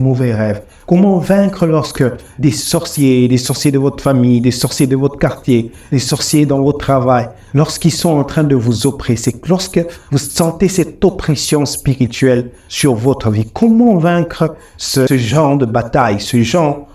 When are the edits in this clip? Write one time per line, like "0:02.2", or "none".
0:15.1